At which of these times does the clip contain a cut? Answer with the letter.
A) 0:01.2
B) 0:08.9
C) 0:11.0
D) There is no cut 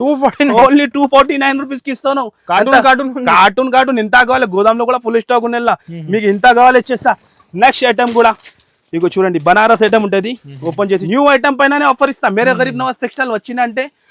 C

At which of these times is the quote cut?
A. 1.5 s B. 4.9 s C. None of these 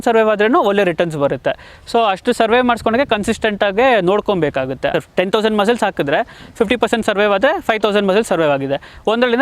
B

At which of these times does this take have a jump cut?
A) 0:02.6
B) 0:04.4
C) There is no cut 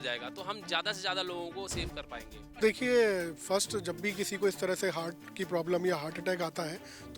A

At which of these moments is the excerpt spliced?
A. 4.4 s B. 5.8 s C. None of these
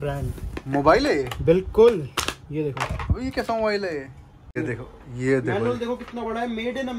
A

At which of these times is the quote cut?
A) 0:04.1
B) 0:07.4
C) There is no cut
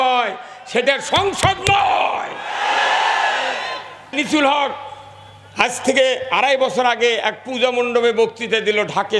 A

